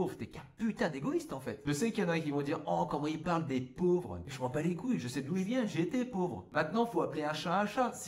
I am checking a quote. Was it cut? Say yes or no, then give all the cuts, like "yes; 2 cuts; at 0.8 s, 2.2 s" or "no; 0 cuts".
yes; 1 cut; at 1.6 s